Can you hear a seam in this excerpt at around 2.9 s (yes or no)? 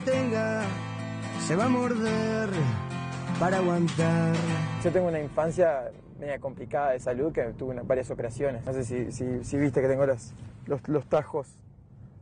no